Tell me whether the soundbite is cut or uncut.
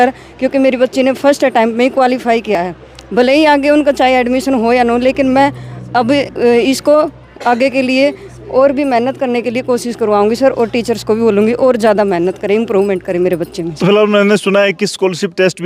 uncut